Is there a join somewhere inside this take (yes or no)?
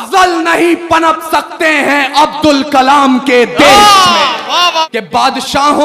yes